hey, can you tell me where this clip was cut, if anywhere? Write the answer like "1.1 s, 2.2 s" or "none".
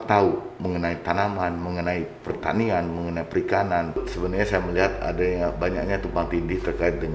4.1 s